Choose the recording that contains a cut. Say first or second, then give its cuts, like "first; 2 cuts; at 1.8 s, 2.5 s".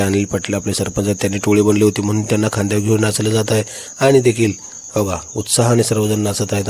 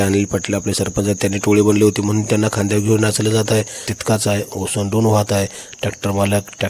second; 1 cut; at 3.9 s